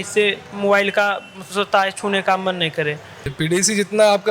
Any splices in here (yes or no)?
yes